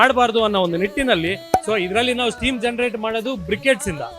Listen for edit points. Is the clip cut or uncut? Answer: cut